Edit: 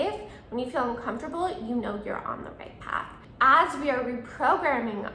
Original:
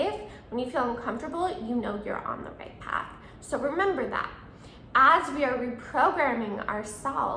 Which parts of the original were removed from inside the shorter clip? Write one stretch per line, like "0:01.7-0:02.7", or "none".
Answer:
0:03.2-0:04.7